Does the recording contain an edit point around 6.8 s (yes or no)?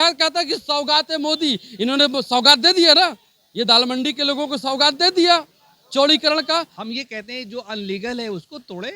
yes